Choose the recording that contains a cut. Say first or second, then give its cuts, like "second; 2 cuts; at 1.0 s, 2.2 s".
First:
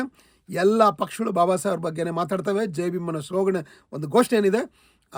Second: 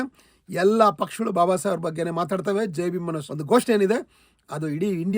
second; 1 cut; at 3.2 s